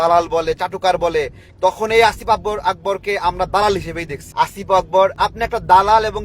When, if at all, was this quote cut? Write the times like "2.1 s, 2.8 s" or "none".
4.1 s, 5.1 s